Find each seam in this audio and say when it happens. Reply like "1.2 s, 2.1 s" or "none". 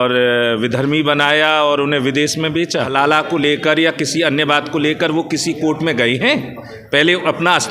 2.9 s